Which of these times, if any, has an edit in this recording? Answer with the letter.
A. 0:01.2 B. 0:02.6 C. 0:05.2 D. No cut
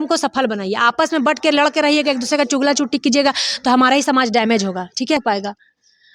C